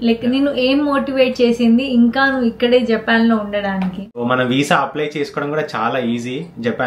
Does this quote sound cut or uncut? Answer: cut